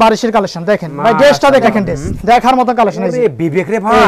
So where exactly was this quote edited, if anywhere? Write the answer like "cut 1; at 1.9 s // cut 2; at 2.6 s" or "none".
cut 1; at 1.7 s